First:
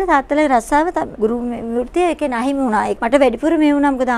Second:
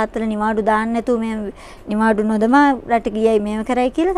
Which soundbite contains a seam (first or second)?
first